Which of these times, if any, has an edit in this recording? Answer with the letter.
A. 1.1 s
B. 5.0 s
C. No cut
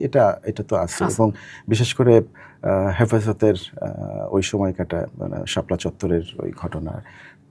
C